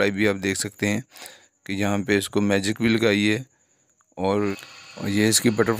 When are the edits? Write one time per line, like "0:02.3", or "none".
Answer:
0:04.8